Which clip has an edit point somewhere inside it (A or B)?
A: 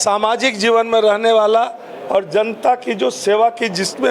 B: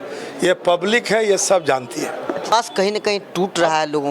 B